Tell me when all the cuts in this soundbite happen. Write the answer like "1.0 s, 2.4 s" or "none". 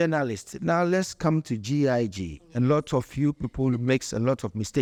none